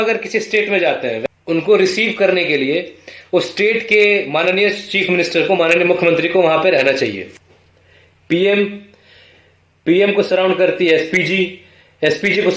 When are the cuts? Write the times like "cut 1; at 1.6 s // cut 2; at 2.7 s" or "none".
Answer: cut 1; at 1.2 s // cut 2; at 7.2 s